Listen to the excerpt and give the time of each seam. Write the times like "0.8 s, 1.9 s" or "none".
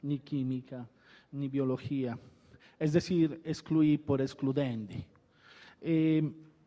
none